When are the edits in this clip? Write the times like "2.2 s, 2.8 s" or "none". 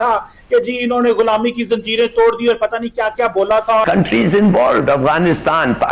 3.8 s